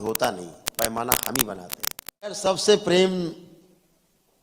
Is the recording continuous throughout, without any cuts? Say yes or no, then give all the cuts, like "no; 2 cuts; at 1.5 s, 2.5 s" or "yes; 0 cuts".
no; 1 cut; at 2.5 s